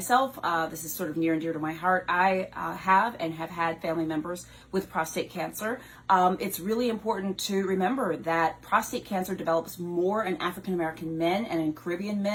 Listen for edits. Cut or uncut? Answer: uncut